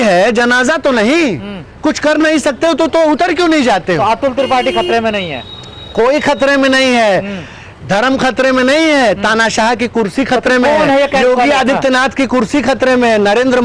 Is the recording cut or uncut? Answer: uncut